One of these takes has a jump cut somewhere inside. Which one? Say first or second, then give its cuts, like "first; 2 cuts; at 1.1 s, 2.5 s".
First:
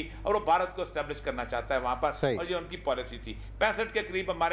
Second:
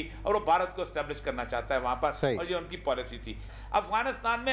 second; 1 cut; at 3.5 s